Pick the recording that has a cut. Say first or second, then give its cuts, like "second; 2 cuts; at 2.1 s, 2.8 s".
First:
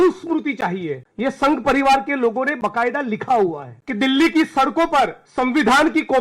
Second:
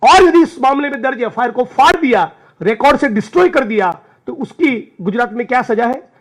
first; 3 cuts; at 1.0 s, 3.7 s, 5.2 s